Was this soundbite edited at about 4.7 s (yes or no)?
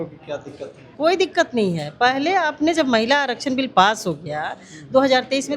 no